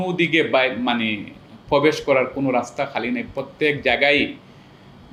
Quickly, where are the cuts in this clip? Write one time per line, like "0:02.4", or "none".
none